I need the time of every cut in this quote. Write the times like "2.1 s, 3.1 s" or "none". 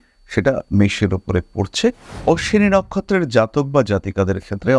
2.1 s